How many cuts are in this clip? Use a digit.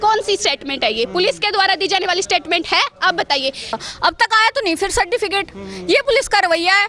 1